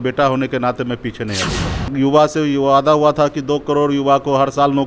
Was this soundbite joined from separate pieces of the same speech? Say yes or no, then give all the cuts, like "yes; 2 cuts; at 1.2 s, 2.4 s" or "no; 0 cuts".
yes; 1 cut; at 1.9 s